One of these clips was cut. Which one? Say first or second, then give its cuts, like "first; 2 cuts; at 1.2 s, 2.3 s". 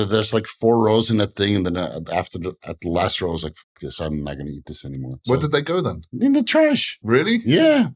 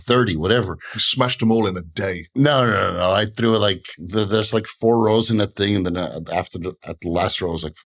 first; 3 cuts; at 5.1 s, 6.0 s, 6.9 s